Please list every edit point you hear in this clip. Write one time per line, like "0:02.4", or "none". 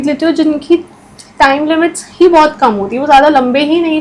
none